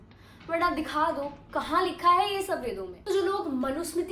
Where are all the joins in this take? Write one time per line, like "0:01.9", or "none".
0:02.9